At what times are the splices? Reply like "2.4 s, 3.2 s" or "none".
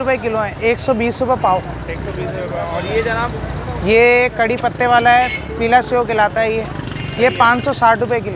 none